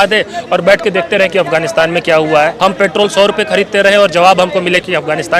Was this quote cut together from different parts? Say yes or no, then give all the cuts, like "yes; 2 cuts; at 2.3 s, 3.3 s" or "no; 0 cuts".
yes; 1 cut; at 2.5 s